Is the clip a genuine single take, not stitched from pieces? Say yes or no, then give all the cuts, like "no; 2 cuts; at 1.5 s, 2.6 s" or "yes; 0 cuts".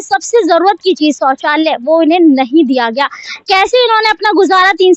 yes; 0 cuts